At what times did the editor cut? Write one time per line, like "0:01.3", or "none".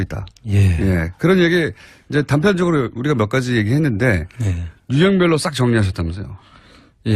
0:02.9

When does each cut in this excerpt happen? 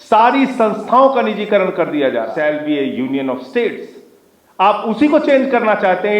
0:02.3

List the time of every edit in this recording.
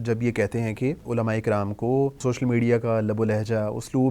0:01.0
0:02.2

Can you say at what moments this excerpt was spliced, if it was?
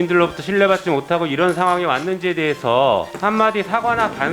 0:03.1

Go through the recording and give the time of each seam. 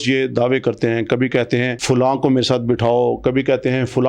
0:01.8

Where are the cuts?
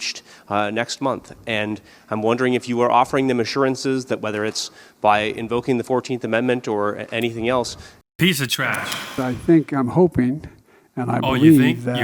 0:09.0

